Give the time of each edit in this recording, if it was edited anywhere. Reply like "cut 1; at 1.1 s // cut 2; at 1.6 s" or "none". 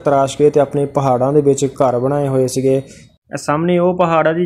cut 1; at 3.0 s